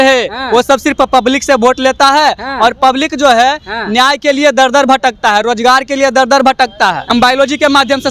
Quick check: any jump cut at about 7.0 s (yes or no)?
yes